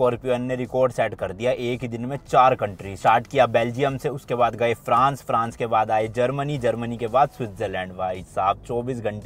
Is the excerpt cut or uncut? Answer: uncut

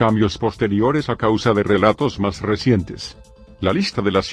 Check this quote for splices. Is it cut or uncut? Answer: uncut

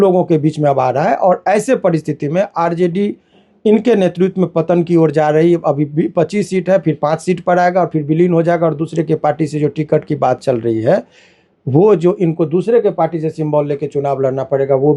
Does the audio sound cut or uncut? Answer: uncut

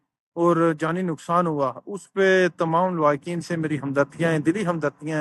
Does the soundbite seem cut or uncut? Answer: uncut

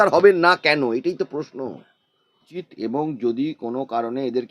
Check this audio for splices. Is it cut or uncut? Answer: cut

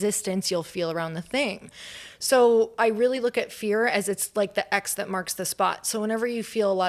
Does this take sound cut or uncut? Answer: uncut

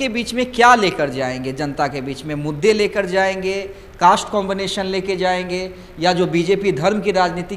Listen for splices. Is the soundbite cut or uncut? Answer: uncut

